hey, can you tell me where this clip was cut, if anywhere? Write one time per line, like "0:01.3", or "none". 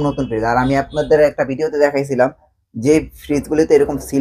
none